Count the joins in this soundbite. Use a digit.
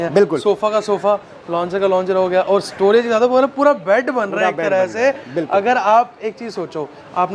0